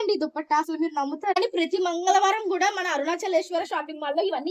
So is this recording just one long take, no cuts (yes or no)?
no